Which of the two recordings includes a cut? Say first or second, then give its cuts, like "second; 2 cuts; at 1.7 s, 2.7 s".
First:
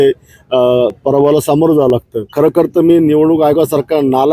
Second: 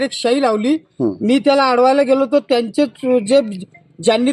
first; 1 cut; at 2.2 s